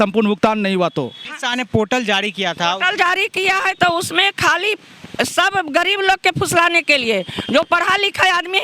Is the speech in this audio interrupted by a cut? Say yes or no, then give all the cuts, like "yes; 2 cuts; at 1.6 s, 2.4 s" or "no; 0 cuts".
no; 0 cuts